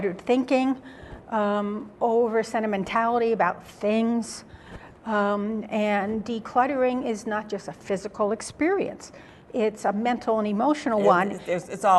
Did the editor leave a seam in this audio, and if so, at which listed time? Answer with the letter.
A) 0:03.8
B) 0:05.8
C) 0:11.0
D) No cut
A